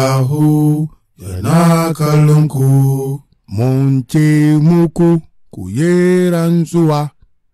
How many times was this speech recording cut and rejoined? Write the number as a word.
one